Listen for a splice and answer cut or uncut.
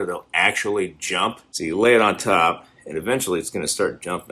cut